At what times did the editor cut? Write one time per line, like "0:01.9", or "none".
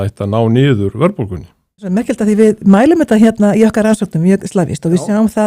0:01.9